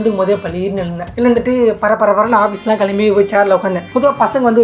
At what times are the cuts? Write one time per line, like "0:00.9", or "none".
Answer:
0:01.1
0:03.8